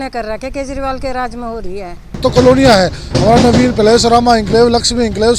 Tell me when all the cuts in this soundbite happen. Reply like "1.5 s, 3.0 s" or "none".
2.2 s